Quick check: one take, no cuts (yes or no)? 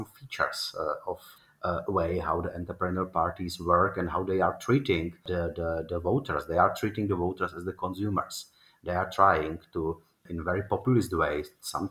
no